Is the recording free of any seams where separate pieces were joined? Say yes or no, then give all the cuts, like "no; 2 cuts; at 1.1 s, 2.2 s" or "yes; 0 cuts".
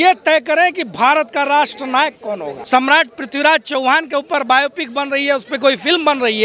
no; 1 cut; at 2.5 s